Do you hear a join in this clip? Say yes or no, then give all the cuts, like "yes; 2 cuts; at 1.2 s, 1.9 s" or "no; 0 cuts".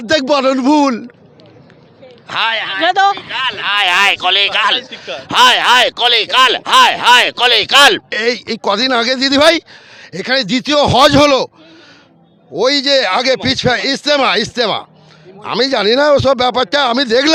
no; 0 cuts